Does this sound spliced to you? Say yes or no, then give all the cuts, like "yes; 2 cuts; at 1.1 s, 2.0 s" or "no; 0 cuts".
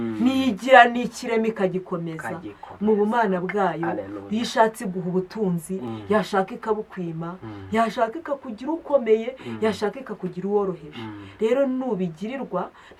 no; 0 cuts